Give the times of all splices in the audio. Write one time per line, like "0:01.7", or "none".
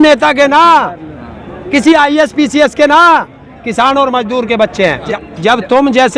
0:05.1